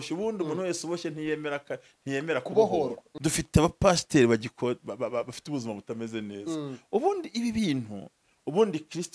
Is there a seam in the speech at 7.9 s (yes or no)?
no